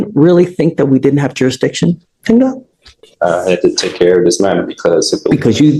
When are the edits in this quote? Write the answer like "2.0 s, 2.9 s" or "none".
none